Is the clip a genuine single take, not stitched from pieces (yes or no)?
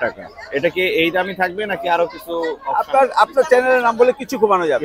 yes